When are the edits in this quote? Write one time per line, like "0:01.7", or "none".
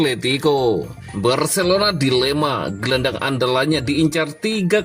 0:01.0